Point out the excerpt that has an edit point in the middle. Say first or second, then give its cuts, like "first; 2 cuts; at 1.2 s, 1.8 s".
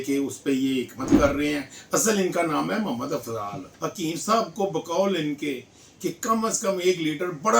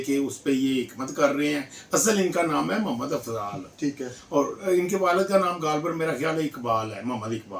first; 1 cut; at 3.6 s